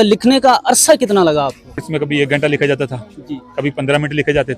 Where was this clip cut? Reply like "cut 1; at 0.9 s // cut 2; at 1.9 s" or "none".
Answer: cut 1; at 1.9 s